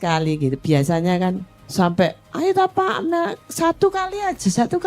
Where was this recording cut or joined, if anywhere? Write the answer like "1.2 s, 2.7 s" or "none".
1.5 s, 2.2 s

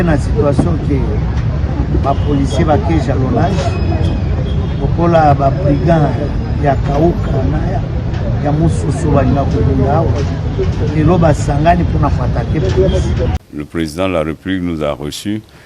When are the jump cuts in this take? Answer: 13.3 s

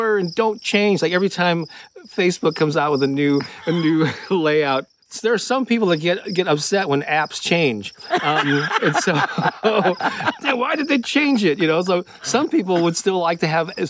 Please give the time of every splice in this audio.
5.0 s

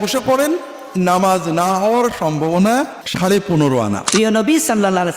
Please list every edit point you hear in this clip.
3.0 s, 4.0 s

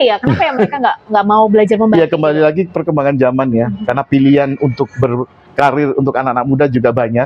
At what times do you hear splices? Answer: none

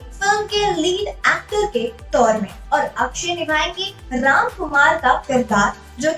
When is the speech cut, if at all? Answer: 2.5 s

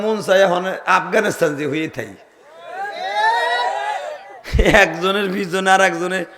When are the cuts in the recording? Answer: none

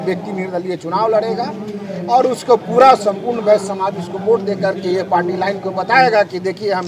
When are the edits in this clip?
none

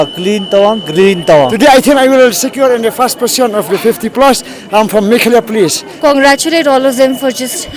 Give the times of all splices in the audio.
1.5 s, 5.9 s

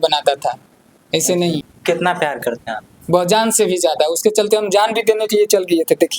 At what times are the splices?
1.7 s

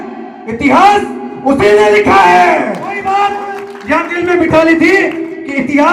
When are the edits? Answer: 3.0 s

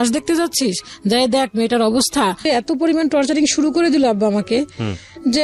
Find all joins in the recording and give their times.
2.4 s

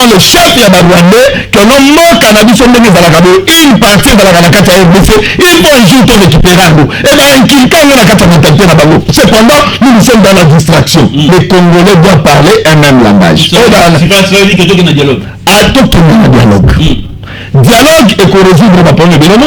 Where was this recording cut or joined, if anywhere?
11.3 s

